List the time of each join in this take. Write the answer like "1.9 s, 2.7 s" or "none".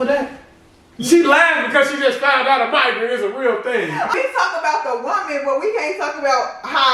4.1 s